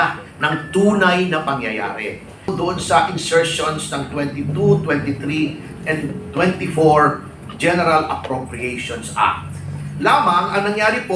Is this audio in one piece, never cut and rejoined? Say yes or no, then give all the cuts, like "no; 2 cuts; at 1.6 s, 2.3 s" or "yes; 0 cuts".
no; 1 cut; at 2.5 s